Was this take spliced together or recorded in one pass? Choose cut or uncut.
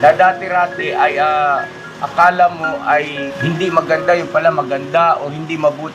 cut